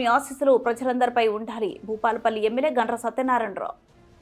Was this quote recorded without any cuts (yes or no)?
yes